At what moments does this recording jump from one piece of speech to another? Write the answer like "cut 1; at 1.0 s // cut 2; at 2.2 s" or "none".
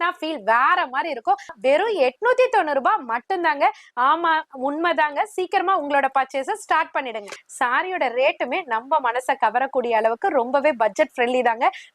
cut 1; at 1.5 s // cut 2; at 7.4 s